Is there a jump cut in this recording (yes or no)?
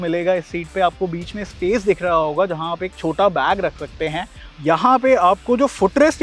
yes